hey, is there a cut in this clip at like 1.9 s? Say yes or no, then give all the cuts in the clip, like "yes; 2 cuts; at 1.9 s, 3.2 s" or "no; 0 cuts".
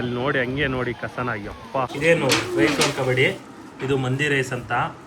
yes; 1 cut; at 1.9 s